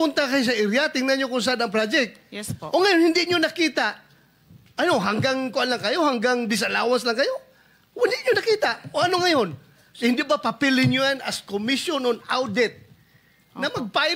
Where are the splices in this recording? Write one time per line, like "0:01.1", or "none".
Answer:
none